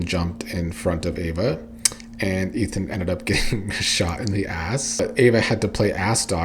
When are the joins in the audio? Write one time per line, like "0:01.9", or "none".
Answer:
0:05.0